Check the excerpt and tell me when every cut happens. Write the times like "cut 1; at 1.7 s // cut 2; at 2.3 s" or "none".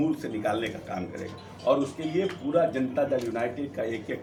none